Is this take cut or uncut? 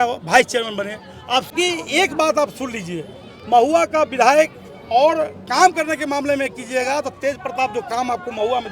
cut